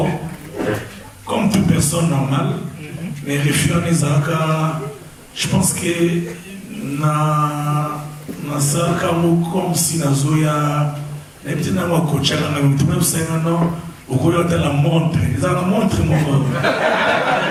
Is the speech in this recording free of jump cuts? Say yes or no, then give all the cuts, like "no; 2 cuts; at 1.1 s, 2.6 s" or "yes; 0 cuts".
yes; 0 cuts